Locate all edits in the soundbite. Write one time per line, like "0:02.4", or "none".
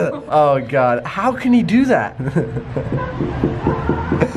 none